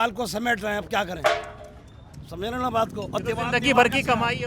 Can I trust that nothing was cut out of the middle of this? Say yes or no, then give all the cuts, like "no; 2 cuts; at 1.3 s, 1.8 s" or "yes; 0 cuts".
yes; 0 cuts